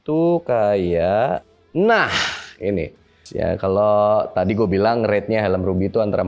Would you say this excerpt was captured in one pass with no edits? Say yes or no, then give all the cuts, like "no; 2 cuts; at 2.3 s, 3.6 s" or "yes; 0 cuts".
no; 2 cuts; at 1.6 s, 3.2 s